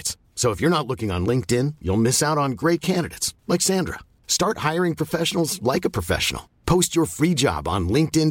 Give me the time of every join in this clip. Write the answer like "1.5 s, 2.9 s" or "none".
none